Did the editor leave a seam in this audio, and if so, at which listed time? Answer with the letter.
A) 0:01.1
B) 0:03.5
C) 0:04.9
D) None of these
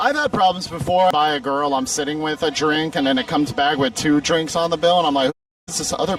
A